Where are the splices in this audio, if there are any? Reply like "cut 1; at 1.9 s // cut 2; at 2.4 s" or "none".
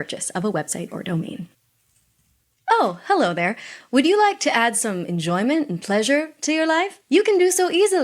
cut 1; at 1.6 s